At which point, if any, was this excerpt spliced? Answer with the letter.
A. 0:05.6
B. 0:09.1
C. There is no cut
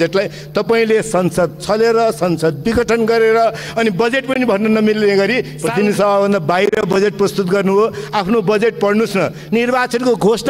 A